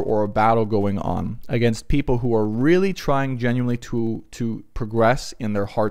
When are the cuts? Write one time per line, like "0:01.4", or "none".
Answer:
none